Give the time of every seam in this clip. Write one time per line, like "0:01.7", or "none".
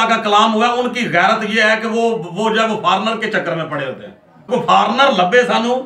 none